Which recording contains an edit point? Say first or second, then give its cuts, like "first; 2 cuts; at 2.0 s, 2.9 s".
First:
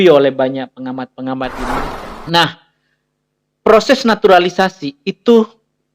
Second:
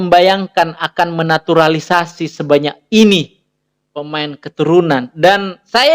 first; 1 cut; at 1.8 s